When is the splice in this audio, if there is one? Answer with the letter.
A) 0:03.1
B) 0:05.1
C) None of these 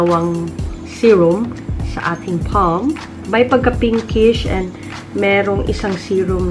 A